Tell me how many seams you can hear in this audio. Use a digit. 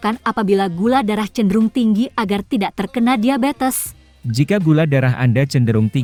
0